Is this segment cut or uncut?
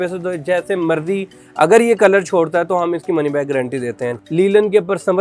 cut